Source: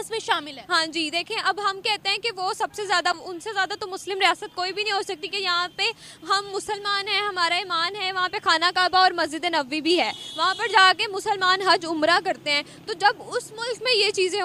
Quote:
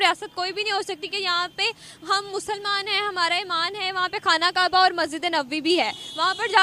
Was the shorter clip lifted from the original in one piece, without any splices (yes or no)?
yes